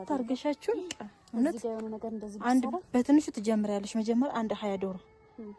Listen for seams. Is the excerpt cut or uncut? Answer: uncut